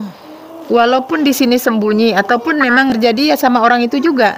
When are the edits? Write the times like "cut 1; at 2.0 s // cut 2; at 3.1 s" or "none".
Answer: cut 1; at 3.0 s